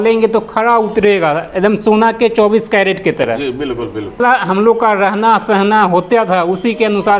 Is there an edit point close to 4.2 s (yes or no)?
yes